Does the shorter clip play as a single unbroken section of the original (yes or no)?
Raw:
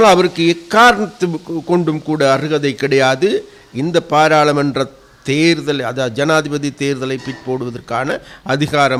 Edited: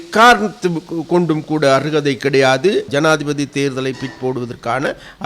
no